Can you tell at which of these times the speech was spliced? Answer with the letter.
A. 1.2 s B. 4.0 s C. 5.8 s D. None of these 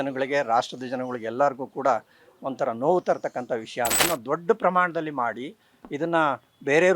B